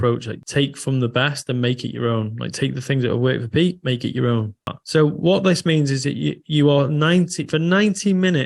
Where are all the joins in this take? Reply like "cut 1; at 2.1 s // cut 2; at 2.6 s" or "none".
cut 1; at 4.7 s

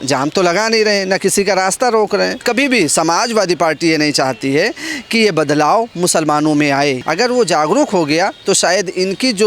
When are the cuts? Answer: cut 1; at 2.4 s // cut 2; at 7.0 s

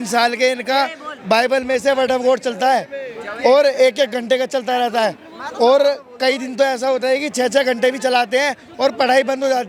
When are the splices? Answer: none

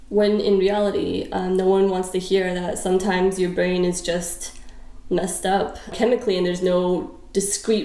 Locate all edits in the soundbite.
cut 1; at 5.9 s

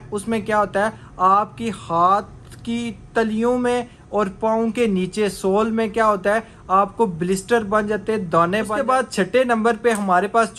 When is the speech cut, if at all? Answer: cut 1; at 8.8 s

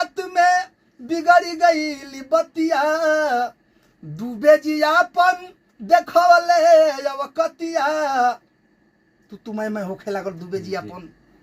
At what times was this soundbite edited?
none

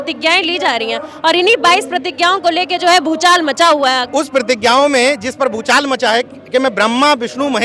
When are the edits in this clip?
cut 1; at 4.0 s

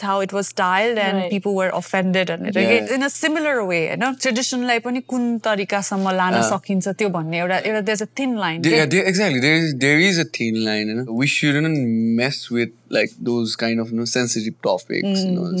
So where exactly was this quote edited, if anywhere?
none

